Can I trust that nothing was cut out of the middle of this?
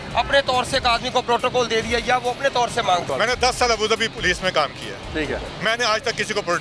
no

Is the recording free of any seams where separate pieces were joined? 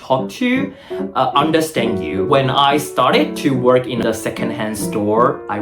no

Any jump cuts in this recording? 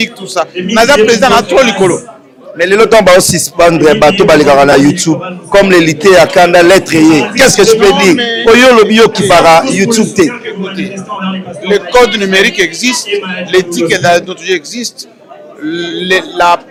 no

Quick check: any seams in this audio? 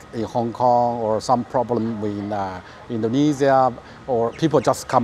no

